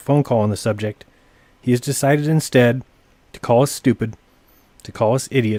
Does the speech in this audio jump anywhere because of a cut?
no; 0 cuts

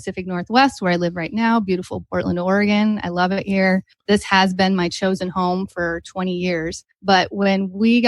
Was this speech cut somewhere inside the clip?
yes; 2 cuts; at 3.9 s, 6.8 s

